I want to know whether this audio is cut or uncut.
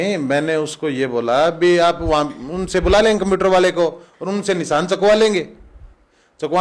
uncut